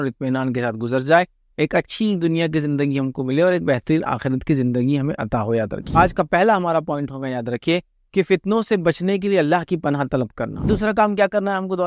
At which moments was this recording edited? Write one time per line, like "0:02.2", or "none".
0:06.0
0:10.7